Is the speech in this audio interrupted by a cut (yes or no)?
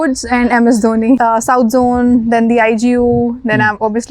yes